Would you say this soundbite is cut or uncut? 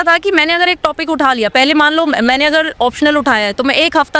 uncut